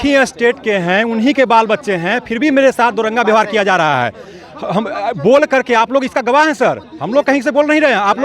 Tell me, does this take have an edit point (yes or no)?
no